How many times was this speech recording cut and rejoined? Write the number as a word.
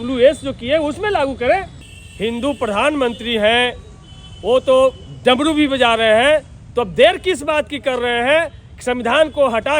one